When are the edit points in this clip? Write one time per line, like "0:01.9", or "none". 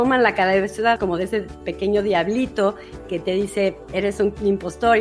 0:01.0
0:03.8